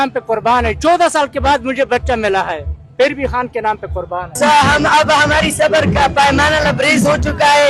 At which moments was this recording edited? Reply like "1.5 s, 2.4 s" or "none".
4.3 s